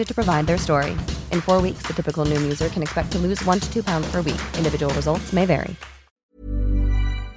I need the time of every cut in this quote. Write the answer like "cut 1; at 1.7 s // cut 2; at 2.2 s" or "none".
cut 1; at 6.1 s